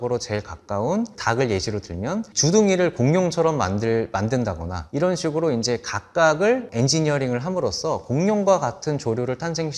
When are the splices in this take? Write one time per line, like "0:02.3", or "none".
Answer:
0:04.8